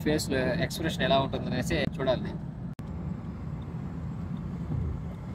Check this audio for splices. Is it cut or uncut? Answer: uncut